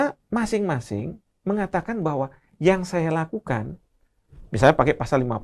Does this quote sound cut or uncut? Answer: uncut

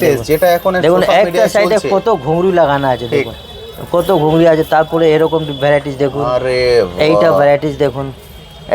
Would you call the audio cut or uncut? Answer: uncut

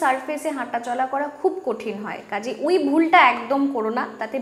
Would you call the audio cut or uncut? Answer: uncut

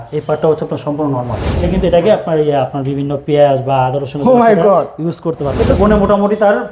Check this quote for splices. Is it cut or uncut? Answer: cut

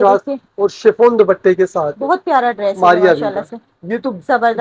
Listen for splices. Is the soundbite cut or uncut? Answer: uncut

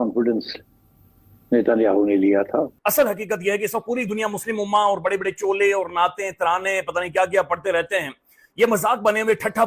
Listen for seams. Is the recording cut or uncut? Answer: cut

